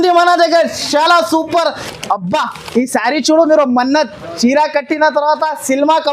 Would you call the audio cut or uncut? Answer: cut